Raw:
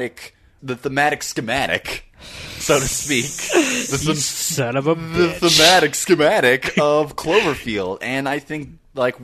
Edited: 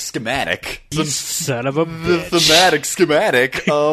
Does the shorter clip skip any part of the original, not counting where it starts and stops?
yes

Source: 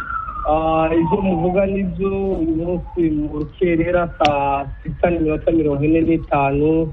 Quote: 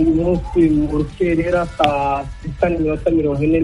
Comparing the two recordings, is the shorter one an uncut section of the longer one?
yes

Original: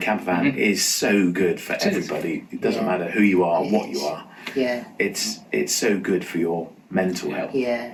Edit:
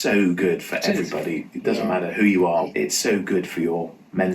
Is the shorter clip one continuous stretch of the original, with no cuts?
no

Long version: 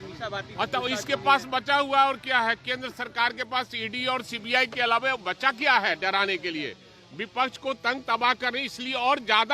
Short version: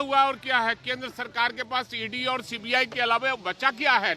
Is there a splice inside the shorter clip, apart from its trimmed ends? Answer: no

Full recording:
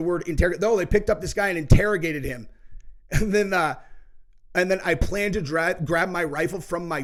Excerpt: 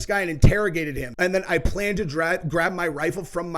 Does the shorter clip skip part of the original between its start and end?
yes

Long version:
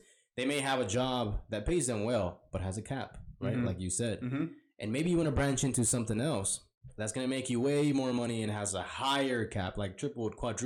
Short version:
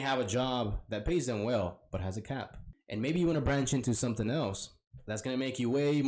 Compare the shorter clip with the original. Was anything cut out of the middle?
yes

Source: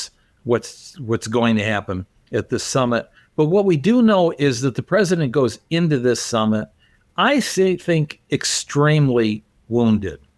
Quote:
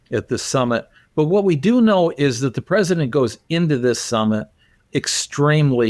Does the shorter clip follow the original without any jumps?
no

